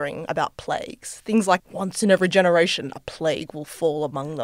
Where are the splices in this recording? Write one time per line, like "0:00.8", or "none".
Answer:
0:01.7